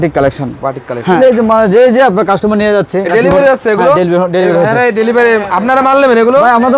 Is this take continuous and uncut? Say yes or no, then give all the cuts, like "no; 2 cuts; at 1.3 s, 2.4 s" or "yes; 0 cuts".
no; 1 cut; at 1.2 s